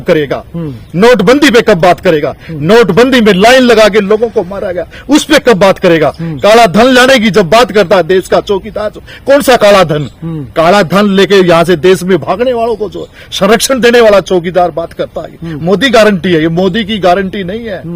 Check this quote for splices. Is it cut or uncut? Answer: uncut